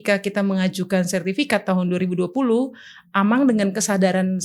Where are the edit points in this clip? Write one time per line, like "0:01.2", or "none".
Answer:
none